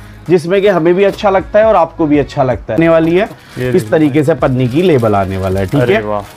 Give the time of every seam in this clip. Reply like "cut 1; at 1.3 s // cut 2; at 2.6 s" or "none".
cut 1; at 2.8 s